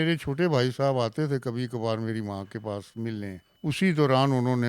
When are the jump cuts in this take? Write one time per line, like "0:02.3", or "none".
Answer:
0:03.4